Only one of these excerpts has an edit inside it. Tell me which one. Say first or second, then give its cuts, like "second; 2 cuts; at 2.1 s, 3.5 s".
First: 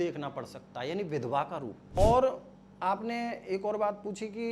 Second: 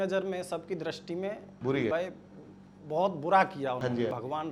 first; 1 cut; at 1.8 s